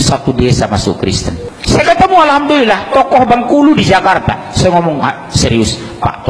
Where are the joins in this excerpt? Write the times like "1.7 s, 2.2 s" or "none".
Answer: 1.5 s